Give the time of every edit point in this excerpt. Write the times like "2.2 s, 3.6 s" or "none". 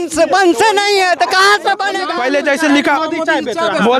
2.0 s